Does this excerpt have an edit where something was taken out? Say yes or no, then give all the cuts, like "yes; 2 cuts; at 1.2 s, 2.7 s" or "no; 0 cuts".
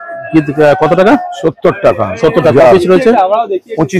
no; 0 cuts